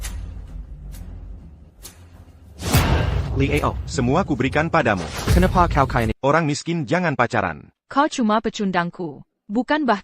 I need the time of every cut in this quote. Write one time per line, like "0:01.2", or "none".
0:06.1